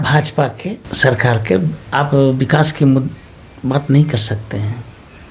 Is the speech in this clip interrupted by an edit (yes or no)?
no